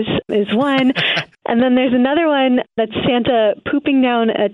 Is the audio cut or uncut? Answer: cut